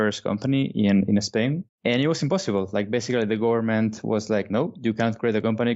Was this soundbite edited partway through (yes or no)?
yes